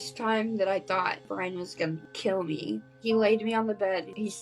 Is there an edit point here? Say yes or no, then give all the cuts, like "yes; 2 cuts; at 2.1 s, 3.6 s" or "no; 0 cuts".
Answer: yes; 2 cuts; at 1.3 s, 2.9 s